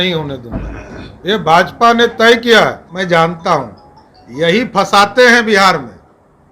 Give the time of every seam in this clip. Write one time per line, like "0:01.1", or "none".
0:02.9